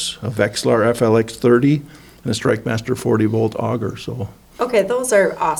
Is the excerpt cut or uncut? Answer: uncut